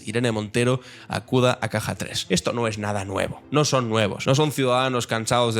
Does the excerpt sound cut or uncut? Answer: cut